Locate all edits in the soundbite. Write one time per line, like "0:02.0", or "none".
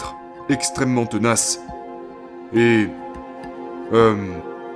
none